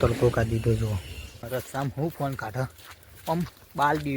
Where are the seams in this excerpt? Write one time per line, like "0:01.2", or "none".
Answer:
0:01.5